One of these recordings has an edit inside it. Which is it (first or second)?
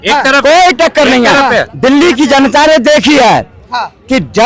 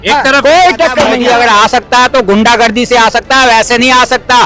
second